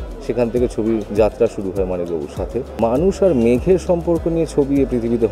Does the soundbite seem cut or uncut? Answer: cut